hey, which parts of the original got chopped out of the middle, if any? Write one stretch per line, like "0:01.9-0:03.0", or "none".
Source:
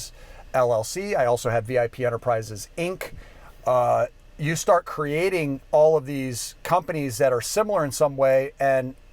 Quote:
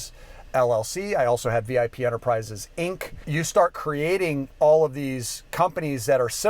0:03.2-0:04.3